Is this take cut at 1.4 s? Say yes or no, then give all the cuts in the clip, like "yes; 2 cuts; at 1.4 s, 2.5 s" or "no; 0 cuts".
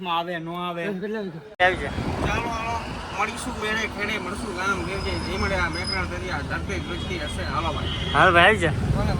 yes; 1 cut; at 1.4 s